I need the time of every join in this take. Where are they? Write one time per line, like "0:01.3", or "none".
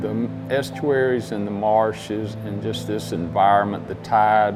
none

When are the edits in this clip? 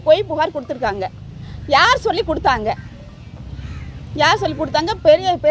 none

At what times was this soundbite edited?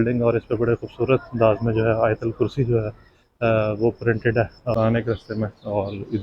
0:04.7

